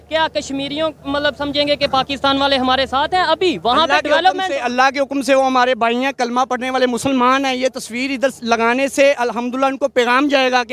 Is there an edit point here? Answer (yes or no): no